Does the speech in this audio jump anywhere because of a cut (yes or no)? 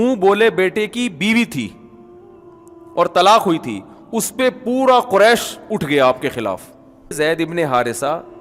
yes